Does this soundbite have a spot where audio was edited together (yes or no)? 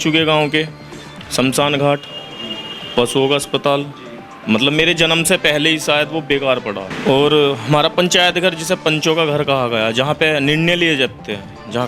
no